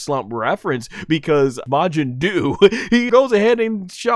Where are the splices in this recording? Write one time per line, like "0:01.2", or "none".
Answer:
0:01.6
0:03.1